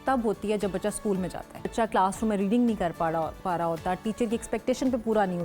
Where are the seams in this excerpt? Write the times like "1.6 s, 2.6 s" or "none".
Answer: 1.7 s